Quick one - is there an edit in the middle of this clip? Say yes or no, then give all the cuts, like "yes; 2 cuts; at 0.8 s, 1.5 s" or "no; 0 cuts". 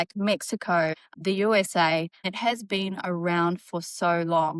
yes; 2 cuts; at 1.1 s, 2.2 s